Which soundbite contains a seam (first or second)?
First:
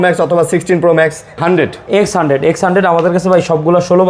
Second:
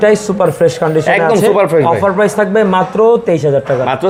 first